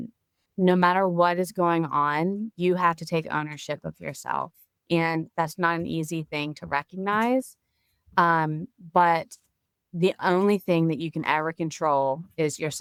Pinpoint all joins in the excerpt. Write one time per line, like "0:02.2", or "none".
none